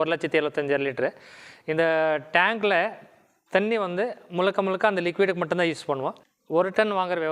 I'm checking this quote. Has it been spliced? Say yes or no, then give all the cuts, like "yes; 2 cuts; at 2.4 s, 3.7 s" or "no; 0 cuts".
yes; 1 cut; at 6.3 s